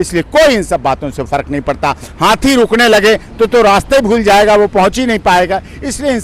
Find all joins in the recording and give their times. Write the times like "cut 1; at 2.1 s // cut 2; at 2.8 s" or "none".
none